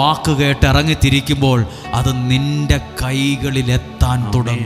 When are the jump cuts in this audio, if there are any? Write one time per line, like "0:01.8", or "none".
none